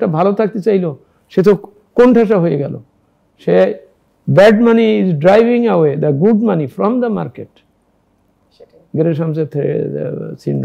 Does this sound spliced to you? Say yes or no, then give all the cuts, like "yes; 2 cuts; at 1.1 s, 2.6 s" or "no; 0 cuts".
no; 0 cuts